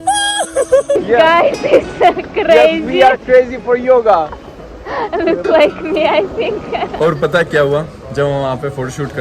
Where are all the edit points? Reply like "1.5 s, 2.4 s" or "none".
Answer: 1.0 s, 6.9 s